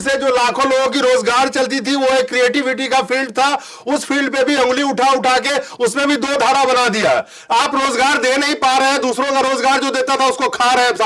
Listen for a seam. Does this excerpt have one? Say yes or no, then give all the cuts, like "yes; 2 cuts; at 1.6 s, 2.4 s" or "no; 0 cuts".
no; 0 cuts